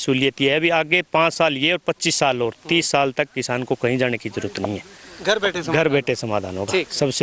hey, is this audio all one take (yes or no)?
yes